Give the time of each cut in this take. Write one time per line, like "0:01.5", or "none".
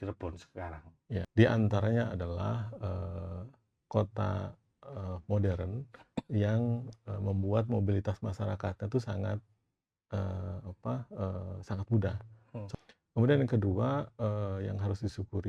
0:01.3
0:12.7